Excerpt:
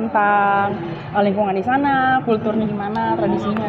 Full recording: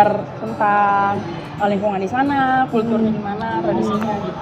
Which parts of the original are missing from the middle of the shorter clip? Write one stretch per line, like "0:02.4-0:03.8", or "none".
none